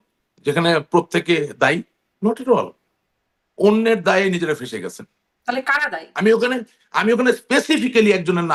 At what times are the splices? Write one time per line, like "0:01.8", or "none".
none